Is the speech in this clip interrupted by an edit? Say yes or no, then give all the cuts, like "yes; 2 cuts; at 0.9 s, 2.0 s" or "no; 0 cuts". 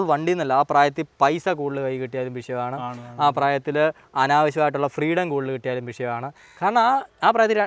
no; 0 cuts